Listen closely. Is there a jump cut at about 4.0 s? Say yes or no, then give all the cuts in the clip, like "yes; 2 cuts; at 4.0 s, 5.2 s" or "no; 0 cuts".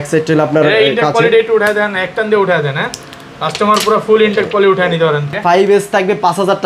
no; 1 cut; at 5.4 s